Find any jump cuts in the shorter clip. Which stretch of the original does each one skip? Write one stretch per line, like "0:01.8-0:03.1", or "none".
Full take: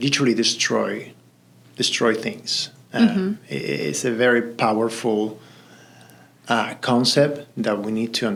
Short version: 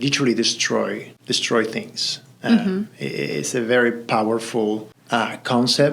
0:01.1-0:01.6
0:05.4-0:06.3